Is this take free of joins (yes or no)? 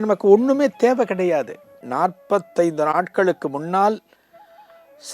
no